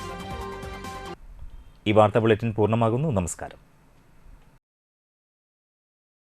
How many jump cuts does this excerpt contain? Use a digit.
0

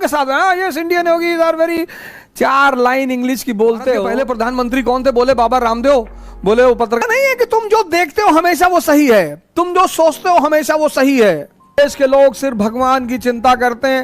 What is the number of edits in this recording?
3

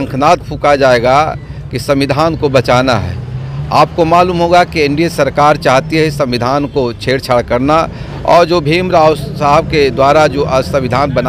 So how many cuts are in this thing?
0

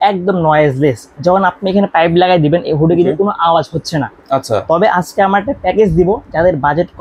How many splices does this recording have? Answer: 0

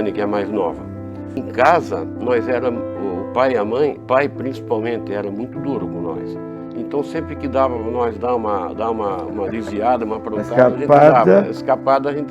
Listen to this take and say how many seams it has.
3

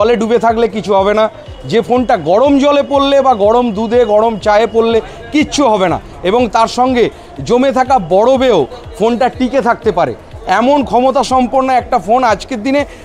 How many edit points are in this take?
0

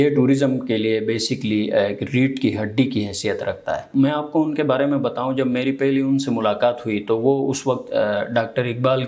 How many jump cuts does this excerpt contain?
1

